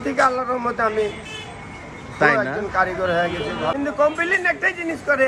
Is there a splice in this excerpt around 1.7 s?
no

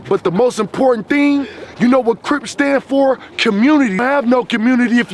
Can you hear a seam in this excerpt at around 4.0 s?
yes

